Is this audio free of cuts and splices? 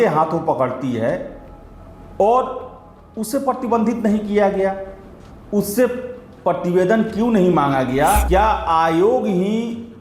no; 1 cut; at 8.2 s

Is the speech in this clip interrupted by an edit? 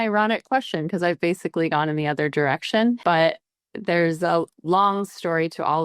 yes; 2 cuts; at 3.0 s, 4.5 s

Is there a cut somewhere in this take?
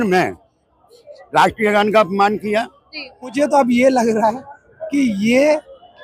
yes; 1 cut; at 3.3 s

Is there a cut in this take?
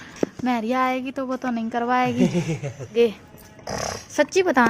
yes; 1 cut; at 2.9 s

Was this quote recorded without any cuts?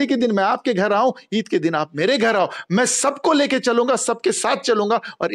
yes; 0 cuts

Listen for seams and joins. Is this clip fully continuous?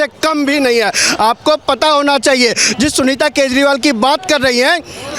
yes; 0 cuts

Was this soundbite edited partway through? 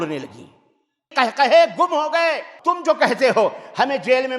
yes; 2 cuts; at 1.1 s, 2.5 s

